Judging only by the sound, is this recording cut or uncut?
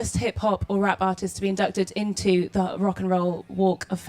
cut